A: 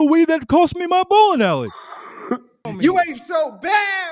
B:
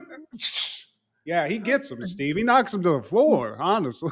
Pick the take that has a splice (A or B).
A